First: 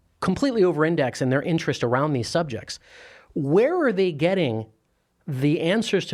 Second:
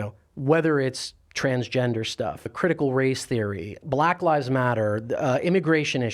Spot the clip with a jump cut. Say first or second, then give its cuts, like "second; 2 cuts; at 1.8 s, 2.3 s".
second; 2 cuts; at 2.5 s, 3.8 s